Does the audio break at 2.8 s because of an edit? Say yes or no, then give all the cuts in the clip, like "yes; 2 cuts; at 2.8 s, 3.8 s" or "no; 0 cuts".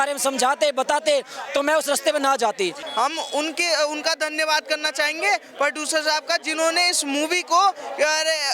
yes; 1 cut; at 2.8 s